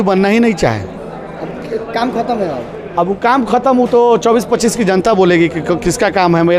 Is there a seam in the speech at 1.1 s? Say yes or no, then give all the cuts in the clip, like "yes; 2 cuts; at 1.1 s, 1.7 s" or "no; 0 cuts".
no; 0 cuts